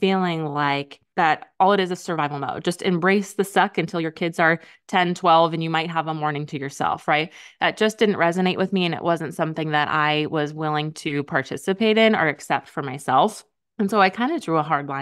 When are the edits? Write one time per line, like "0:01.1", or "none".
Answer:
0:01.0